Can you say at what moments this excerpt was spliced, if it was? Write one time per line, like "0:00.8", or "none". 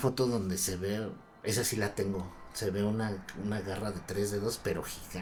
none